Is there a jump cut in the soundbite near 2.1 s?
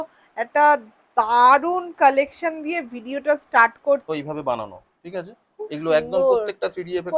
no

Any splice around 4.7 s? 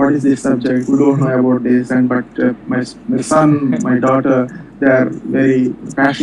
no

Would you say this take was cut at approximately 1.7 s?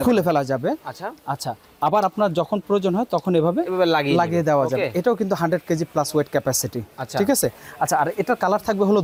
no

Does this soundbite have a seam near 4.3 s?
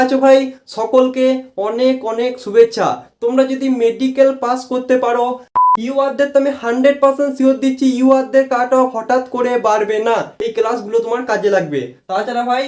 no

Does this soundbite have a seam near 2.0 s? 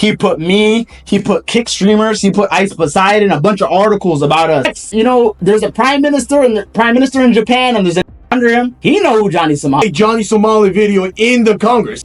no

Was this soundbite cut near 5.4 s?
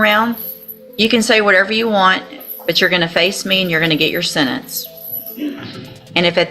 no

